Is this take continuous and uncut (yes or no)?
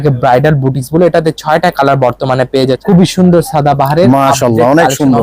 no